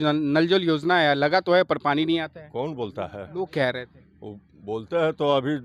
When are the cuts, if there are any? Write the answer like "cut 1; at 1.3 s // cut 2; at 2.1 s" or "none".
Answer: none